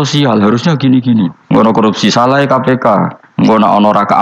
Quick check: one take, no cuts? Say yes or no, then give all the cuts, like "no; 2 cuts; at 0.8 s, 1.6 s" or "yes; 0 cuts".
no; 2 cuts; at 1.6 s, 3.2 s